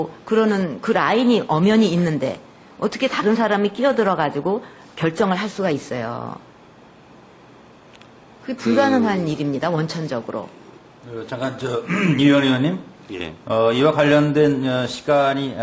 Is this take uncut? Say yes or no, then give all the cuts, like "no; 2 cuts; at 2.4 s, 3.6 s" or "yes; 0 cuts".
yes; 0 cuts